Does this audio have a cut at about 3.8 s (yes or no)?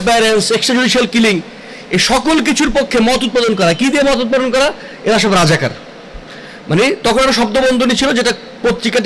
no